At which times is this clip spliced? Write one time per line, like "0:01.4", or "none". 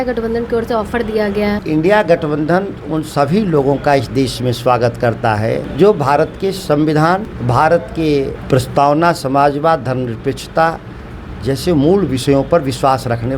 0:01.6
0:05.7
0:07.3
0:08.4